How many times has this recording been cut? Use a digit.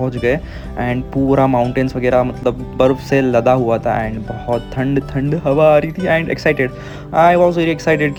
0